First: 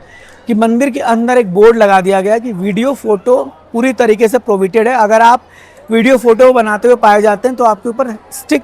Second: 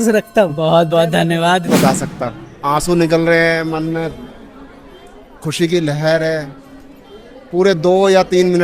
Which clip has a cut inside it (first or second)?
second